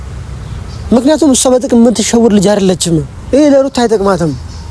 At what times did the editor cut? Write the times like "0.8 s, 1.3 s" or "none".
3.1 s